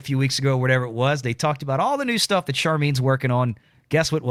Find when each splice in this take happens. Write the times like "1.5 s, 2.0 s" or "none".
none